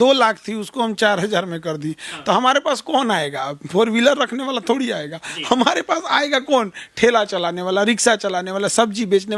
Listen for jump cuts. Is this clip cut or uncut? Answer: uncut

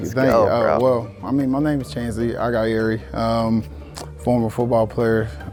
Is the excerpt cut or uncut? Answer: uncut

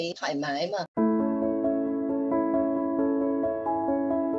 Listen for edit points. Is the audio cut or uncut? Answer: cut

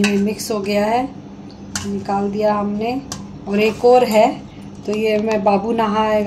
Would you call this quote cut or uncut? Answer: uncut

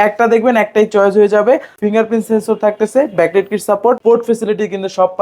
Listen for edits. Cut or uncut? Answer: cut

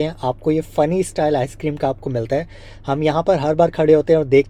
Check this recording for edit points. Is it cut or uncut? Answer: uncut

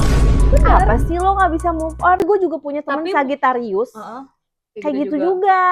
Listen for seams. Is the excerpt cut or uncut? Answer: cut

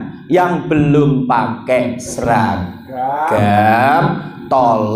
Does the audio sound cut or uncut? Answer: uncut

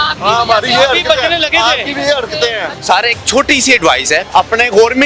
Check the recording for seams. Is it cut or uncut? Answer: cut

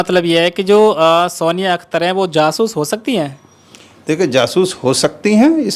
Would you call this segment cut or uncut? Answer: uncut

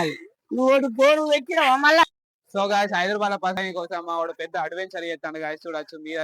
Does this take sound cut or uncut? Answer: cut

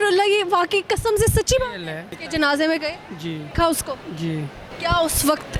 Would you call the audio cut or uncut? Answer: cut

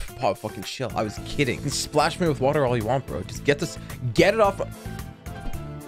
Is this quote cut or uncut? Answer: cut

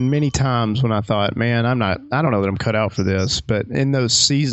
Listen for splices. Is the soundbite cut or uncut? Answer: uncut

